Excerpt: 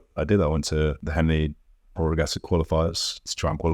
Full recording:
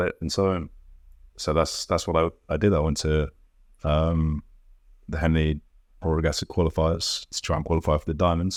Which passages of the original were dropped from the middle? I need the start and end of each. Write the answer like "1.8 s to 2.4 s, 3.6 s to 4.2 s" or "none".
3.4 s to 5.1 s